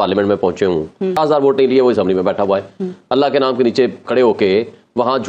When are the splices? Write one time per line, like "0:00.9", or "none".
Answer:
0:01.2